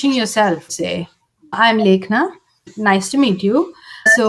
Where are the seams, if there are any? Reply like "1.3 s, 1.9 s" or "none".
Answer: 0.9 s